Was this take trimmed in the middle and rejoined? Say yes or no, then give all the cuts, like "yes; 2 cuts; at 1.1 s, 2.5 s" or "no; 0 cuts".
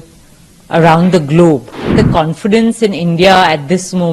yes; 1 cut; at 1.9 s